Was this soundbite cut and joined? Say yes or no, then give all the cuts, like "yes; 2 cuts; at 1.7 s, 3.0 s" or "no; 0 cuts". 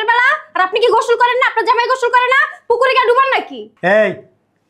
no; 0 cuts